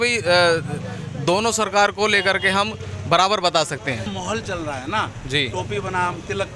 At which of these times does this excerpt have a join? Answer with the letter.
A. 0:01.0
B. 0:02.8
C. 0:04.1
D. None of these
C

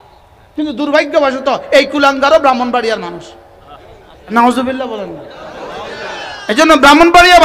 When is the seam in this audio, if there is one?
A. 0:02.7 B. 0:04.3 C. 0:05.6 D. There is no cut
B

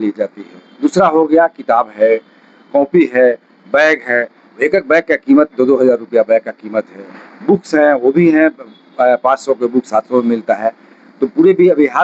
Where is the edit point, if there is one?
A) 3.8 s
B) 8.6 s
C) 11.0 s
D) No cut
D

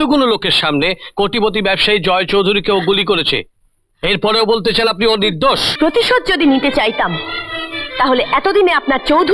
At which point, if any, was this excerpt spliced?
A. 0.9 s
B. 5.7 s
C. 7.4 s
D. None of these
B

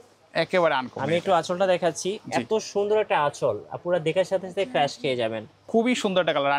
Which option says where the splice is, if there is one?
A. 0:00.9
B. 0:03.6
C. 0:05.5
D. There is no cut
C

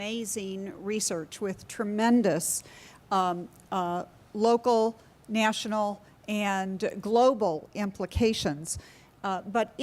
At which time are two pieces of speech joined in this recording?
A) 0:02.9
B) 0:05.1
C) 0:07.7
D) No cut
C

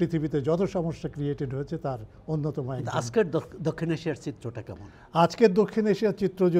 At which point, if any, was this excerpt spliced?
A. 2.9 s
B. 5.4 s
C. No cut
C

